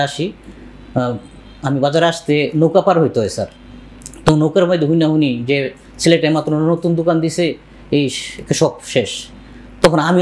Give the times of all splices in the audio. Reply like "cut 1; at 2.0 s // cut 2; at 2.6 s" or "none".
none